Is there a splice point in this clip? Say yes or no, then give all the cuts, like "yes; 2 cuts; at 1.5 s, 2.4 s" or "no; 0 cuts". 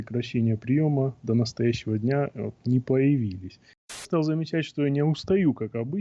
yes; 1 cut; at 4.1 s